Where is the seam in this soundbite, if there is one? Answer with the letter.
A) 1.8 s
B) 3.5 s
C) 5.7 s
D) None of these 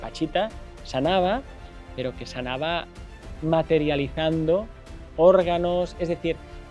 D